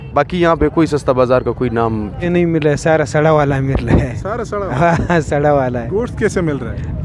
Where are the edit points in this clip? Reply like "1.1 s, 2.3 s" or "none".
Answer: 2.3 s